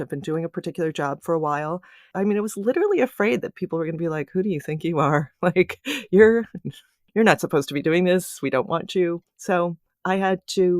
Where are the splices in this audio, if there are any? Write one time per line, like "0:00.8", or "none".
0:02.0
0:09.5